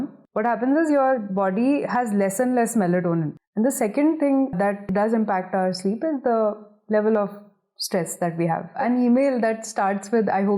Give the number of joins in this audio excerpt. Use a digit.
2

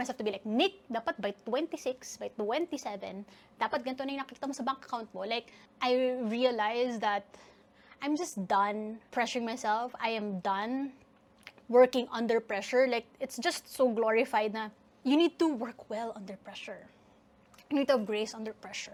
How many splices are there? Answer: 0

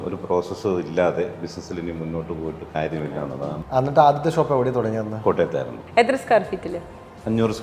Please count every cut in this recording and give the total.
2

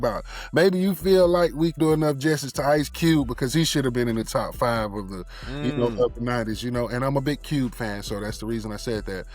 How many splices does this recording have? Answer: 1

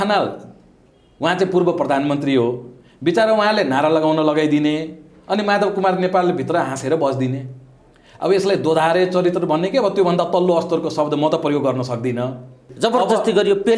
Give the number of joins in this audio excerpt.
1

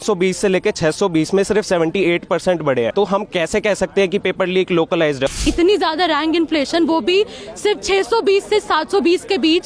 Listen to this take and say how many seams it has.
2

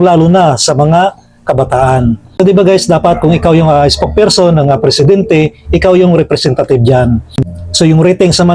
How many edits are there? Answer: 2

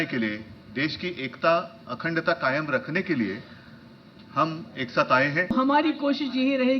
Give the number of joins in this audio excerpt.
1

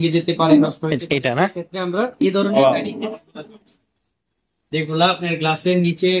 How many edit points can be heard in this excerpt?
0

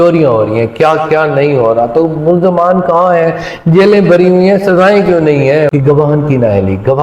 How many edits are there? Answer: 1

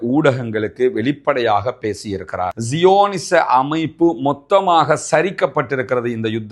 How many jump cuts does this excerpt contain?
1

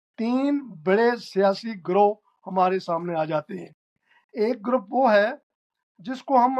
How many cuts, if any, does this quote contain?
0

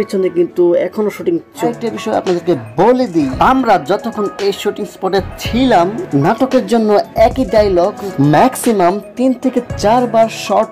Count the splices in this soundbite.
1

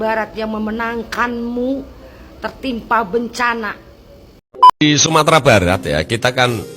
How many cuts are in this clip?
1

